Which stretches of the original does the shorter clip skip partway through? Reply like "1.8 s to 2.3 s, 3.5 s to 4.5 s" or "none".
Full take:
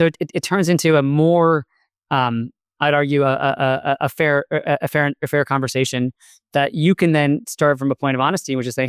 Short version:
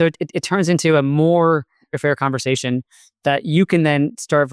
1.9 s to 5.2 s

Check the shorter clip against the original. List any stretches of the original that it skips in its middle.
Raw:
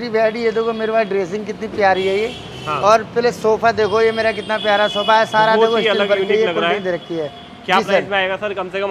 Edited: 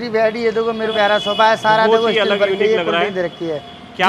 0.9 s to 4.6 s

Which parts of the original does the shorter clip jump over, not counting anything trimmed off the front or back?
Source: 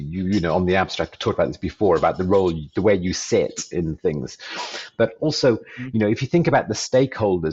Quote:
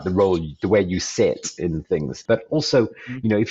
4.3 s to 4.8 s

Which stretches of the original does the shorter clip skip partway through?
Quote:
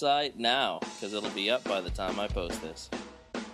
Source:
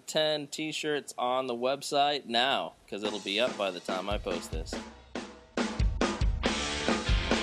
4.4 s to 4.7 s

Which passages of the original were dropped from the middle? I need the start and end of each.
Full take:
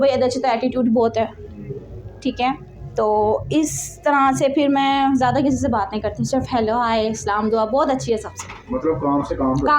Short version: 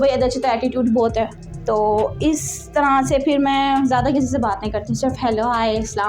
1.5 s to 2.8 s

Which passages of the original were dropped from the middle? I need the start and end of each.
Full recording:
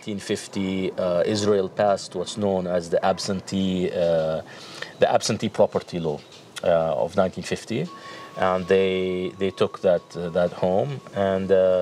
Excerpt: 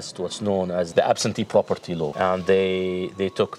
2.8 s to 4.9 s, 6.2 s to 8.3 s

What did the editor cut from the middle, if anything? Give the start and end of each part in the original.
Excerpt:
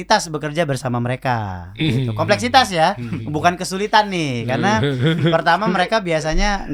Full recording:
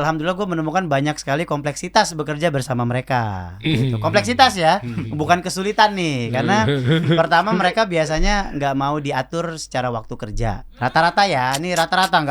none

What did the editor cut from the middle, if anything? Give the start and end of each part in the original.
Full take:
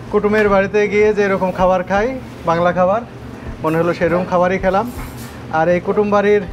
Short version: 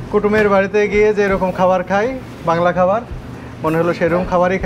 none

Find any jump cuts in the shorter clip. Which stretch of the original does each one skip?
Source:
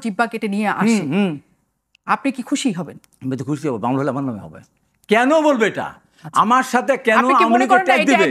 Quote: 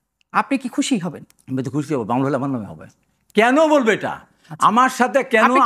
none

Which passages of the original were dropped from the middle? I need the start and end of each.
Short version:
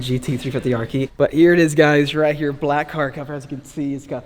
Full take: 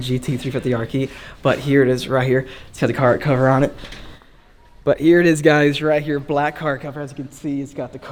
1.1 s to 4.8 s

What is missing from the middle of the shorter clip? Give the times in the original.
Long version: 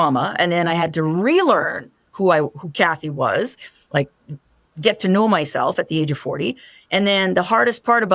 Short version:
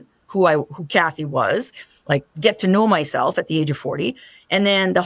4.2 s to 4.7 s

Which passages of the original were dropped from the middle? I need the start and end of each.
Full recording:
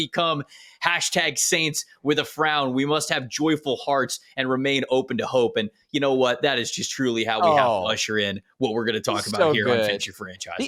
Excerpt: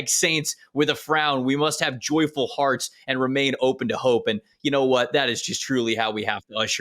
none

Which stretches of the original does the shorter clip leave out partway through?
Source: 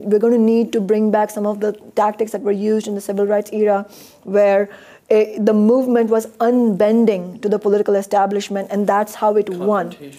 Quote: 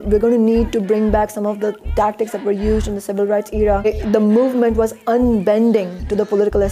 3.9 s to 5.2 s

